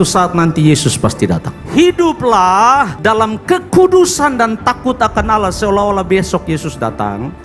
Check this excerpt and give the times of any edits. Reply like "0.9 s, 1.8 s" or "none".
1.6 s